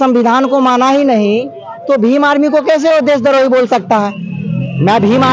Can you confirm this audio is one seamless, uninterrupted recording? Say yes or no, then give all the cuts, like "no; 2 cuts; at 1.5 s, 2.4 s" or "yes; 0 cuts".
yes; 0 cuts